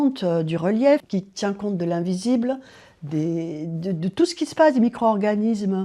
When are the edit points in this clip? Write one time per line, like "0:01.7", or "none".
0:01.1